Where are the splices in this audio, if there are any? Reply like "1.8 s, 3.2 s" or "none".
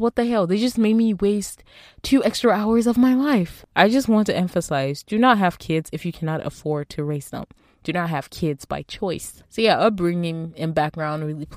3.6 s, 9.4 s

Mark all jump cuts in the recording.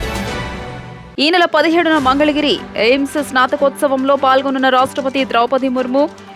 0.9 s

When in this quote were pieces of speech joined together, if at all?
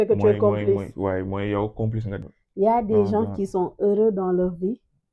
2.1 s

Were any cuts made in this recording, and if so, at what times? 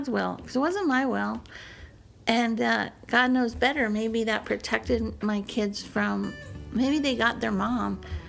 none

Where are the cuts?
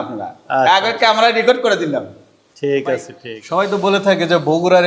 3.2 s

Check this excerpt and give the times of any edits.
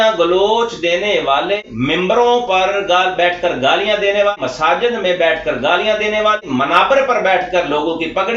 1.6 s, 4.3 s, 6.4 s

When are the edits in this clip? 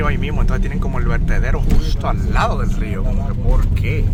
none

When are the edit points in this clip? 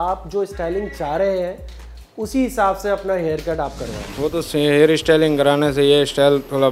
4.0 s

